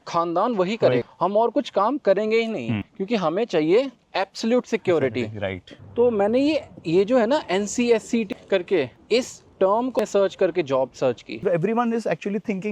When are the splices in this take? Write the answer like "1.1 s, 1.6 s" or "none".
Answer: 5.8 s, 11.4 s

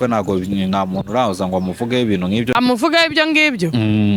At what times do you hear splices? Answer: 2.5 s

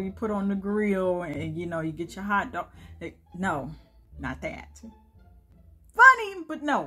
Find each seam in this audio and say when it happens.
none

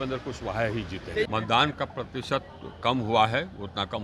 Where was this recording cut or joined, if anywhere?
1.3 s

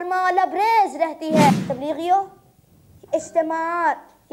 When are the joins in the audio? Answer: 1.6 s

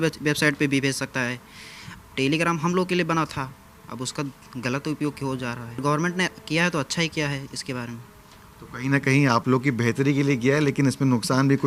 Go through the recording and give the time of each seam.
5.8 s

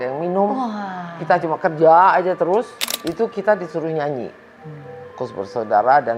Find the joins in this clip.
2.8 s

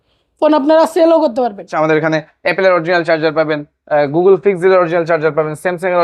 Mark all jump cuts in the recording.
1.7 s

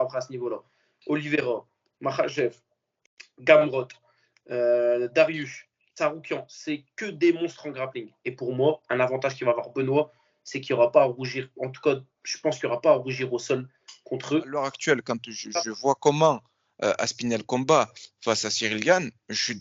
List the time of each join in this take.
14.7 s

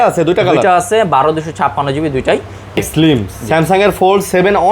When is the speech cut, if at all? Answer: 2.8 s

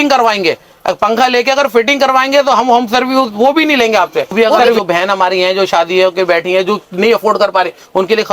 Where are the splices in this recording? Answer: 4.8 s

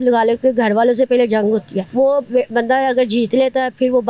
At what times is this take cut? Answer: 1.8 s

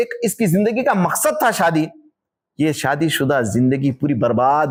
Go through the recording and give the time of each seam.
none

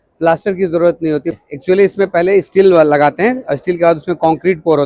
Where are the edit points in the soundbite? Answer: 1.4 s

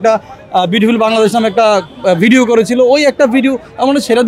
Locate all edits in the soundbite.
none

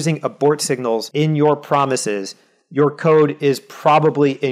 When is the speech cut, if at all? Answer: 1.1 s

